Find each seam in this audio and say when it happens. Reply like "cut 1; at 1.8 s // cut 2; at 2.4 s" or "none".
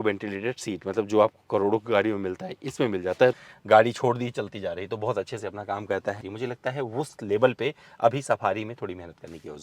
cut 1; at 3.3 s // cut 2; at 6.2 s